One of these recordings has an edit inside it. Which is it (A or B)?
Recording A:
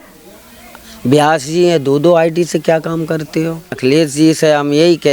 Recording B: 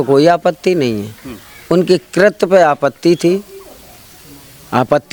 A